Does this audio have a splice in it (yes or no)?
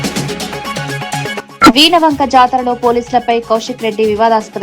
yes